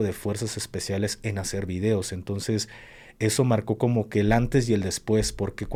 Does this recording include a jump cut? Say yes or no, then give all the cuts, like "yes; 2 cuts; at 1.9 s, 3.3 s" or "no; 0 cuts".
no; 0 cuts